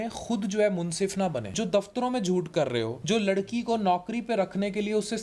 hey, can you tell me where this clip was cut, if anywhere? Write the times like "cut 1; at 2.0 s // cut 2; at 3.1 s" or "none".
cut 1; at 1.5 s // cut 2; at 3.0 s